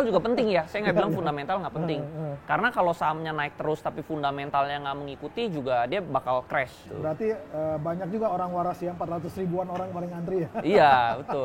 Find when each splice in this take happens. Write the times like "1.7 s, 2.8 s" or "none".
6.8 s